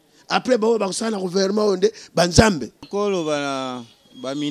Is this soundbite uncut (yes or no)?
no